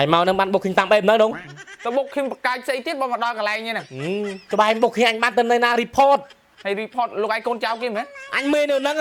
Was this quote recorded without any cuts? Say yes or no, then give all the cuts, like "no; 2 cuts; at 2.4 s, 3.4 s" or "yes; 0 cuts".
yes; 0 cuts